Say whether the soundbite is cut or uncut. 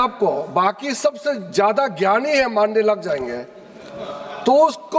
uncut